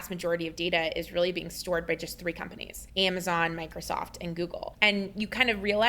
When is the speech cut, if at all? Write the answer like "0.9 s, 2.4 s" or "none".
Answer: 4.7 s

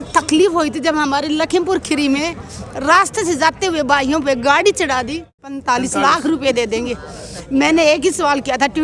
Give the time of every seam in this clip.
5.6 s

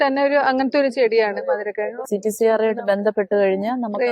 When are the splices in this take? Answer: 2.0 s

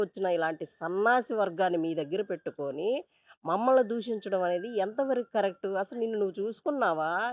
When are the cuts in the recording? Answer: none

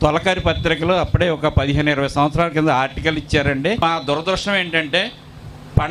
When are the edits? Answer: 3.8 s

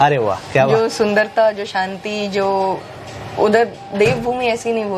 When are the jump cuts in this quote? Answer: none

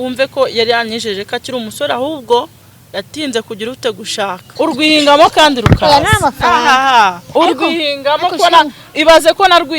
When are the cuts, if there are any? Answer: 4.4 s

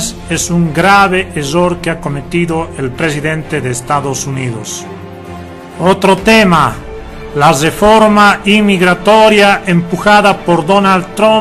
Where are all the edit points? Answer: 10.4 s

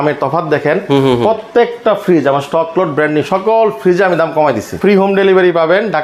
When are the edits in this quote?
4.7 s

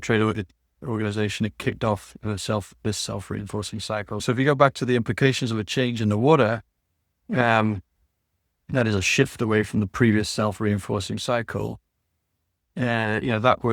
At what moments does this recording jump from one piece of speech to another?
4.2 s

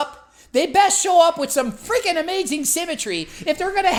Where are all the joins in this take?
none

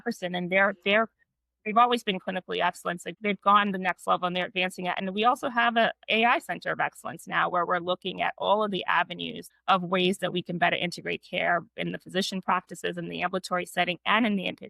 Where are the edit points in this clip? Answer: 3.1 s

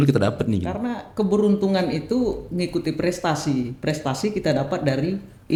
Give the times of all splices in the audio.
none

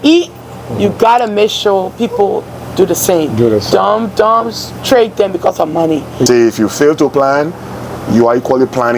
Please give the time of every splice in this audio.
6.3 s

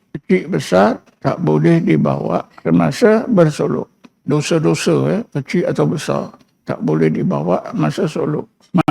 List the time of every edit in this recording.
1.1 s, 2.5 s

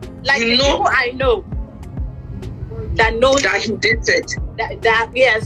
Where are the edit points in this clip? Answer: none

